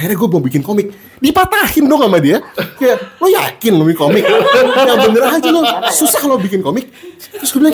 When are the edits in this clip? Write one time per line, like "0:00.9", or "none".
none